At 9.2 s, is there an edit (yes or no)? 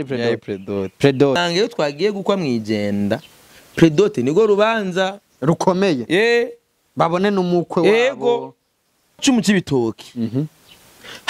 yes